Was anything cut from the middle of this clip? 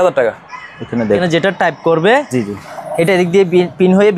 yes; 1 cut; at 1.2 s

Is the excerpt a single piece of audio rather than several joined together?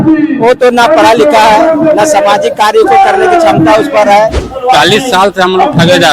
no; 1 cut; at 4.5 s

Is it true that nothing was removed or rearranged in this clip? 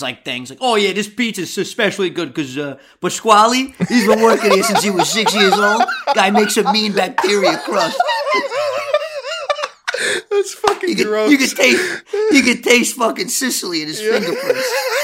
yes; 0 cuts

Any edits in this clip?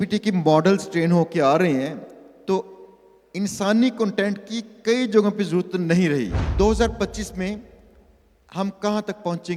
yes; 1 cut; at 6.4 s

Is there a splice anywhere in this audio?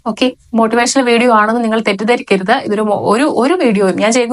no; 0 cuts

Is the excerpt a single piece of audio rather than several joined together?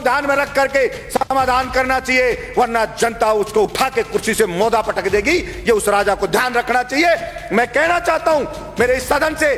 yes; 0 cuts

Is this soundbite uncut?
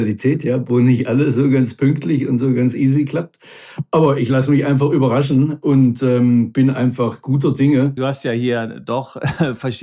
no; 1 cut; at 7.9 s

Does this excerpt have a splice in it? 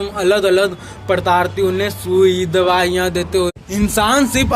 yes; 1 cut; at 3.5 s

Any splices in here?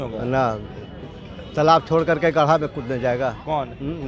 no; 0 cuts

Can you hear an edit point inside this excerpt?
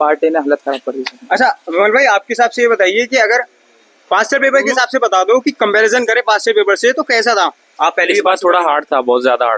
no; 0 cuts

